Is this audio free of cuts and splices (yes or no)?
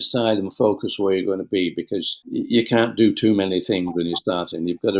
no